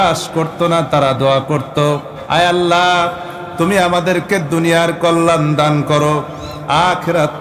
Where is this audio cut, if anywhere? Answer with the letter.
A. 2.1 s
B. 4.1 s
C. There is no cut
A